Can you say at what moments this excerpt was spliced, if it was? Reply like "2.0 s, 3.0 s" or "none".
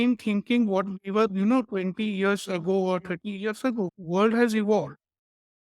3.9 s

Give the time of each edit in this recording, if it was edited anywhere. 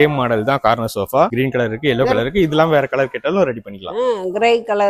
none

